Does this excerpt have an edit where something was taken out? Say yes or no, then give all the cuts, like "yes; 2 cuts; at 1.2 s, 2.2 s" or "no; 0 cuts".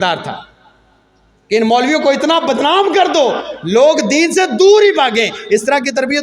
no; 0 cuts